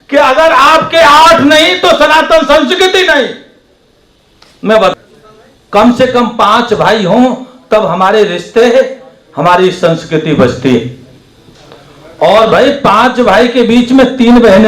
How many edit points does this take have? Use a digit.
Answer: 1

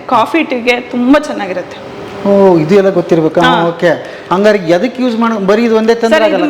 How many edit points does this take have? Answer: 0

